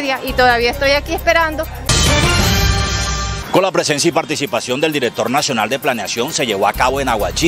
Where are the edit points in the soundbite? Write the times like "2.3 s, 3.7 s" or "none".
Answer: 1.9 s, 3.3 s